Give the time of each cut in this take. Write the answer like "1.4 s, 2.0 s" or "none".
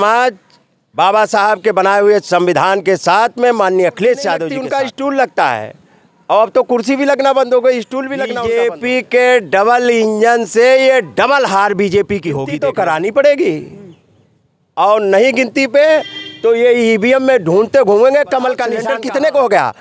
4.5 s, 8.3 s, 12.5 s, 18.8 s